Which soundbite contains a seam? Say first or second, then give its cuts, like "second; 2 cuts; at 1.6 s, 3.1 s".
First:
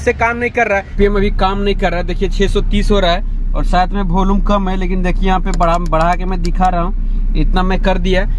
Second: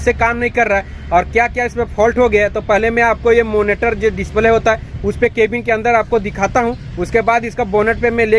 first; 1 cut; at 0.9 s